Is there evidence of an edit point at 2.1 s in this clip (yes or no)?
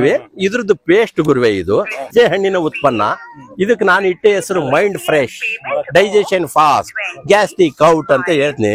yes